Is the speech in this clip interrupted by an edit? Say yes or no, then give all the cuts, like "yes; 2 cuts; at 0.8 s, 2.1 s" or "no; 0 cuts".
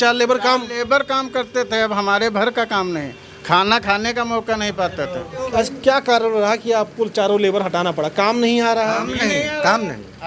yes; 1 cut; at 5.4 s